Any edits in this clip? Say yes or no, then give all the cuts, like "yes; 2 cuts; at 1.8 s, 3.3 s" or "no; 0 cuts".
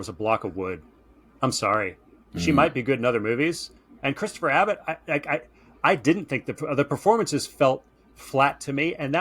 no; 0 cuts